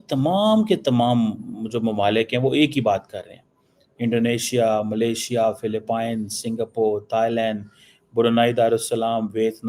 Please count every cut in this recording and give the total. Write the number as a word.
zero